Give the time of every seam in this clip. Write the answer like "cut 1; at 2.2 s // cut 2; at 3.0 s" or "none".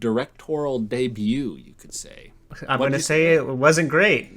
cut 1; at 2.5 s